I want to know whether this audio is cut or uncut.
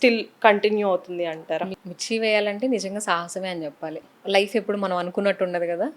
cut